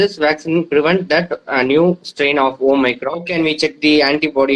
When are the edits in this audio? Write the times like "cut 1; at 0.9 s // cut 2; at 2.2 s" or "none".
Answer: cut 1; at 3.3 s